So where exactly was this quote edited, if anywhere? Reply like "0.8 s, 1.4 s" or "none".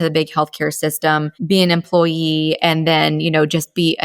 1.3 s